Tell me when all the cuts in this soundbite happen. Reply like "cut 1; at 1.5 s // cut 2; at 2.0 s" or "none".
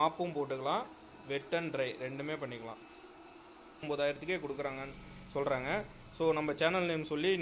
cut 1; at 3.8 s

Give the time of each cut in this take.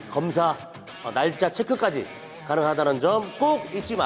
none

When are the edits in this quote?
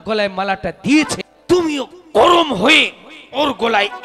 cut 1; at 1.3 s

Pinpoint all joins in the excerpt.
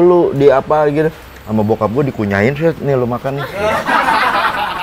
none

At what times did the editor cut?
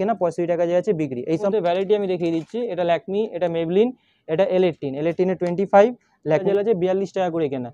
cut 1; at 1.5 s // cut 2; at 6.4 s

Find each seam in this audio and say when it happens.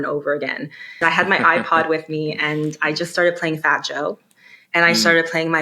cut 1; at 1.0 s

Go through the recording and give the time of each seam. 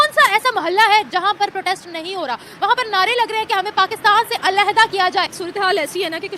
cut 1; at 5.4 s

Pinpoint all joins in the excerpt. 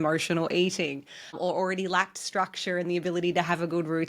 cut 1; at 1.4 s

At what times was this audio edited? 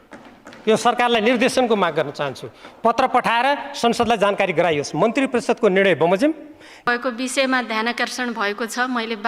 cut 1; at 6.9 s

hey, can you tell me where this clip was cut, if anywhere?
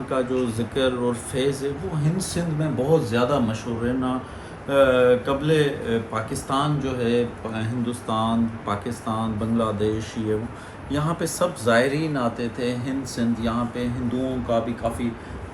none

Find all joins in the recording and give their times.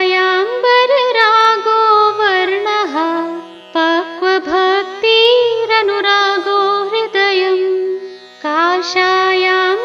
none

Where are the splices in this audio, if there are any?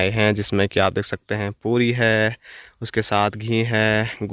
none

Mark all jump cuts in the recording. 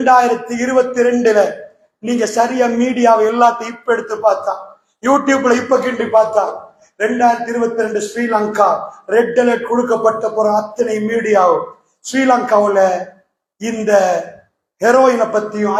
none

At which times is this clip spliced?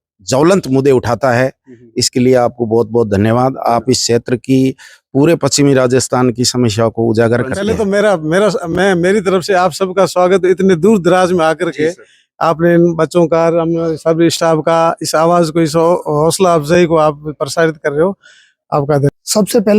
cut 1; at 7.7 s // cut 2; at 19.1 s

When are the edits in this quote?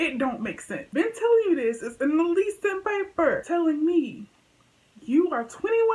cut 1; at 0.9 s // cut 2; at 3.4 s

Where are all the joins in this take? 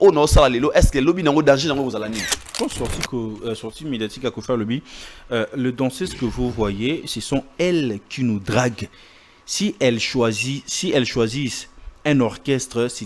cut 1; at 2.4 s

